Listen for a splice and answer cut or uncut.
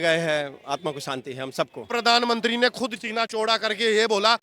cut